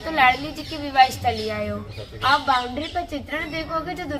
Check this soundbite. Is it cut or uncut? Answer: uncut